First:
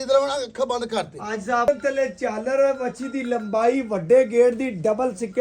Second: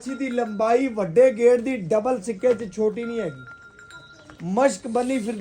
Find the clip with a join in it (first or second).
first